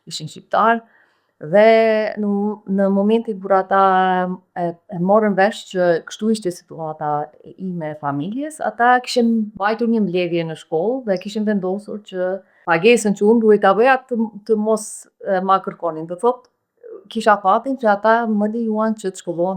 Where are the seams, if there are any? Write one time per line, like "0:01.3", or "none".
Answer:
0:09.6
0:12.5